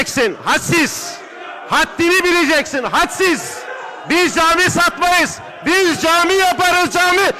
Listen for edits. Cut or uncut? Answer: uncut